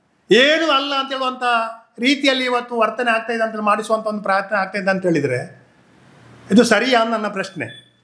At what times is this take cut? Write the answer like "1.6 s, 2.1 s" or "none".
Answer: none